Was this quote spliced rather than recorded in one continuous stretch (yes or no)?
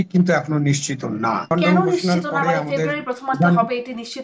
yes